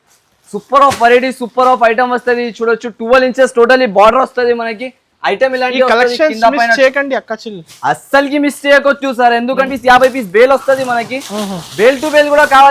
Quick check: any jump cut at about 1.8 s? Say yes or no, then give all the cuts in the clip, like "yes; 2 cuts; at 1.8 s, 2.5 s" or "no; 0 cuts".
no; 1 cut; at 9.7 s